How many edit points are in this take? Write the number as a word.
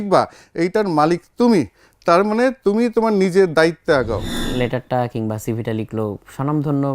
one